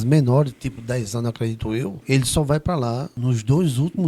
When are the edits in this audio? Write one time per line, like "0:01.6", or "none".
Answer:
0:02.0
0:03.1